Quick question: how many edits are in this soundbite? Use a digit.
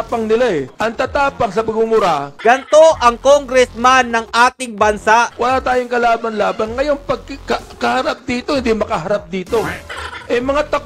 2